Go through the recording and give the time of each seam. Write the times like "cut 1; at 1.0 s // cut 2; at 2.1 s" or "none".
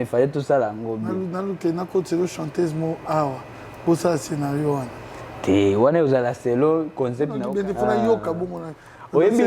cut 1; at 7.4 s

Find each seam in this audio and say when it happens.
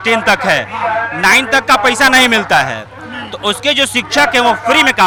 none

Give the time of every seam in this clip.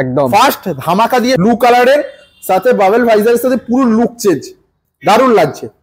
cut 1; at 1.4 s

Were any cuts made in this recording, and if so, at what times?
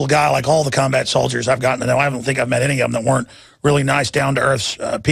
cut 1; at 3.8 s

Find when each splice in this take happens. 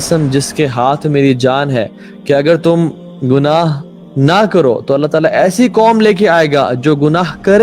none

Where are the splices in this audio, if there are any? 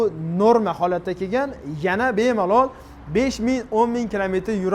none

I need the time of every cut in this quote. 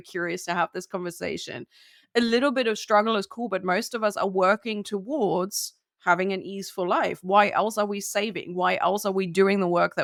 none

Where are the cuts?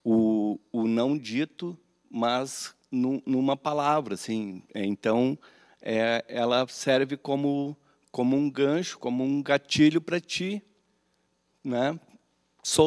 none

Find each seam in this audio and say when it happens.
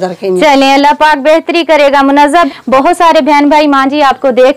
cut 1; at 2.3 s

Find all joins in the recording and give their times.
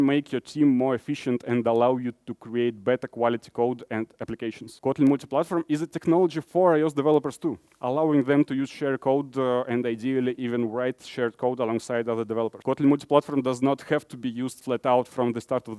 cut 1; at 4.7 s // cut 2; at 12.6 s

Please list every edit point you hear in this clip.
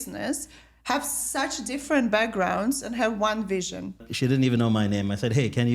cut 1; at 4.1 s

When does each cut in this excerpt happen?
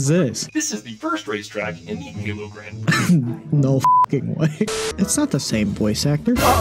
cut 1; at 4.7 s

